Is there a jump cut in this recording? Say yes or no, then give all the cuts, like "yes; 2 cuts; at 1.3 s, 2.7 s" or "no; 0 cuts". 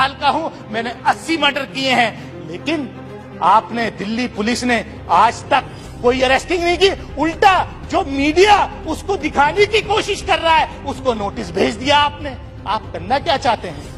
no; 0 cuts